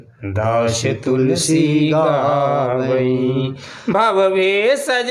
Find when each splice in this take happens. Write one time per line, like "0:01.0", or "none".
none